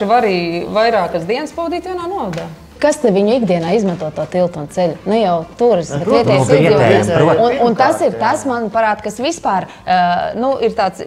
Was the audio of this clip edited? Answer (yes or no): yes